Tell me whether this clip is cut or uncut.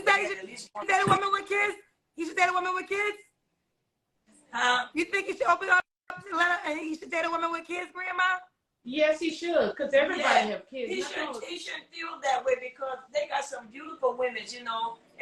uncut